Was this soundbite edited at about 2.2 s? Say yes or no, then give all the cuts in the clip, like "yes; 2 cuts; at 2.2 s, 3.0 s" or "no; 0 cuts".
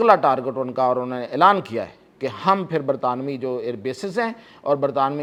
no; 0 cuts